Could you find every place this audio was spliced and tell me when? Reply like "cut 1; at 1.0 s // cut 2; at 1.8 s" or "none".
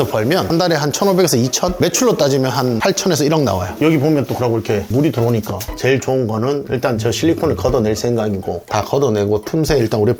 cut 1; at 3.7 s // cut 2; at 5.7 s